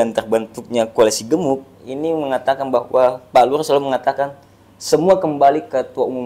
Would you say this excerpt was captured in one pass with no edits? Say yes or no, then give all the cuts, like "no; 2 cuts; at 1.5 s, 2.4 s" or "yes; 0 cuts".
yes; 0 cuts